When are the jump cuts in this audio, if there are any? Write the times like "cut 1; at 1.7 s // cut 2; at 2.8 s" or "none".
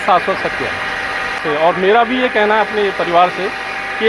cut 1; at 1.4 s

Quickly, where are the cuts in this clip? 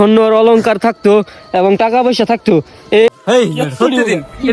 cut 1; at 3.1 s

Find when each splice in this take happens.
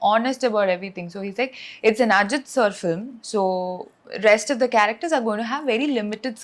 none

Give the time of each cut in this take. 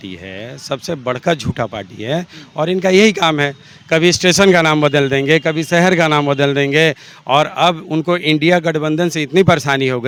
none

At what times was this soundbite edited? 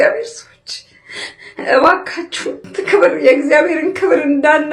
cut 1; at 2.6 s

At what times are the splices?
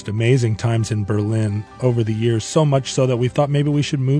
cut 1; at 1.6 s // cut 2; at 3.3 s

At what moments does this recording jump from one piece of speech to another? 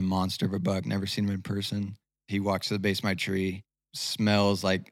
cut 1; at 2.2 s // cut 2; at 4.0 s

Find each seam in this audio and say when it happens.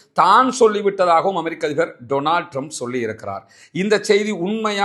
none

